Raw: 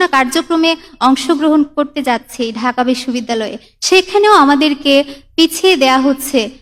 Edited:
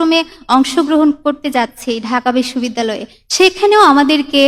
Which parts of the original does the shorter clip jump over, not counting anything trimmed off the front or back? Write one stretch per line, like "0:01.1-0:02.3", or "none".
none